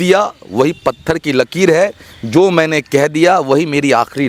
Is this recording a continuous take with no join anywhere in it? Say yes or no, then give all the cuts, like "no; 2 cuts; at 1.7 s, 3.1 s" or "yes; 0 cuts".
yes; 0 cuts